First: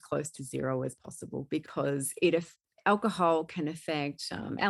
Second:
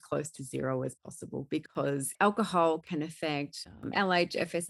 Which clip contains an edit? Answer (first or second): second